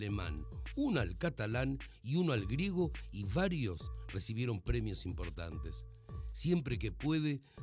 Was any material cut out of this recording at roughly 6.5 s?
no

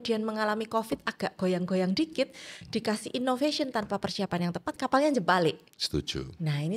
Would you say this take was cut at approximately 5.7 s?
yes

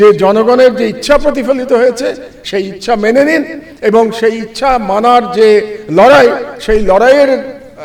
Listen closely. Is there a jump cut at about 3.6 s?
no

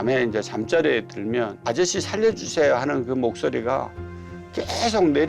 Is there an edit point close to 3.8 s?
no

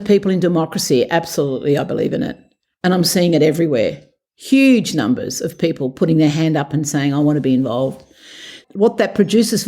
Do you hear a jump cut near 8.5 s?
yes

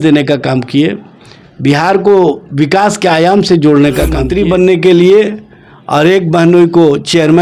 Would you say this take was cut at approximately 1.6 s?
no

